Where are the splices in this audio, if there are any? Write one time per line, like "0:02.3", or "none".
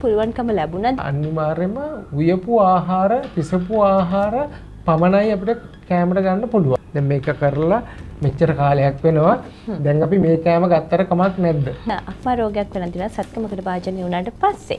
0:01.0
0:06.9
0:11.9